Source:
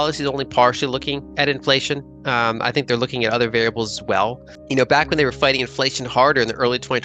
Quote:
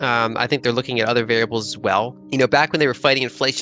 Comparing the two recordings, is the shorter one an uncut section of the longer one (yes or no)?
no